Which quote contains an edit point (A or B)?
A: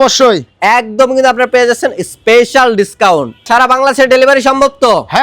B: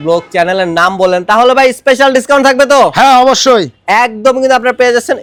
A